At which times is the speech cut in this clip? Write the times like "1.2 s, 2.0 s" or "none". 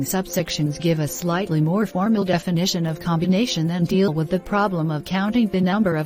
3.5 s